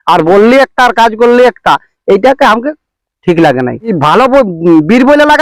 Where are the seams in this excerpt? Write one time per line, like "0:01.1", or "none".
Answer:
0:03.9